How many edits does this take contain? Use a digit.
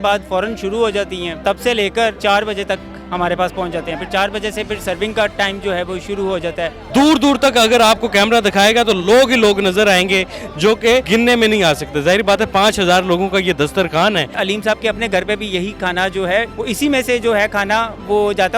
6